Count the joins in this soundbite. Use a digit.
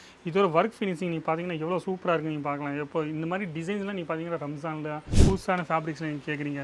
1